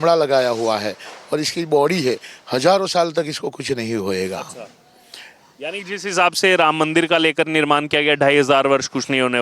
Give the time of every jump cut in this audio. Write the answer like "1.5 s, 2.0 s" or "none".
none